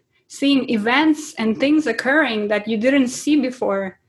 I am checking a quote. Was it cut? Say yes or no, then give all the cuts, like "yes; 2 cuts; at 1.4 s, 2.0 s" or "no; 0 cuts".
no; 0 cuts